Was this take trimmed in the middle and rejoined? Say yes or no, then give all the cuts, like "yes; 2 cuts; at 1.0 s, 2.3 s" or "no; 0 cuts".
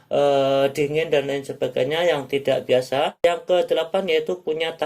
yes; 1 cut; at 3.1 s